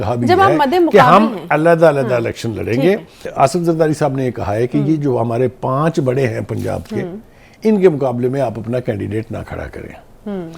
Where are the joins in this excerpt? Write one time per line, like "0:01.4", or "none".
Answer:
0:03.3